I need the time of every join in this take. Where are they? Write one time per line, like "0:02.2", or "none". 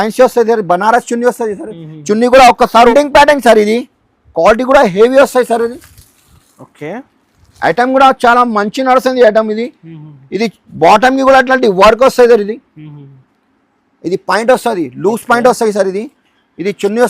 0:02.9